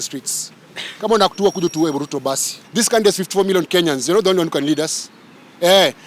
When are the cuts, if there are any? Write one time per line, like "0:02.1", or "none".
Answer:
0:02.5